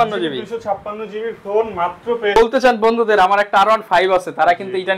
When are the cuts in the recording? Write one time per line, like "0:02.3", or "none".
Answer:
0:02.4